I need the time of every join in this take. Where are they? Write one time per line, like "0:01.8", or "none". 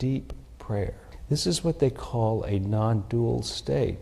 0:01.1